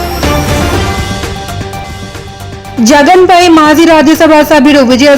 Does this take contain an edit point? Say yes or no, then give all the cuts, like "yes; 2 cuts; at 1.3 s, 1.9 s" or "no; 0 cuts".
yes; 1 cut; at 1.8 s